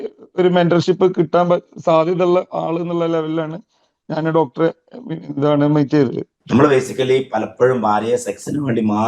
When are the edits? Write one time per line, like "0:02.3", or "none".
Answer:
0:06.2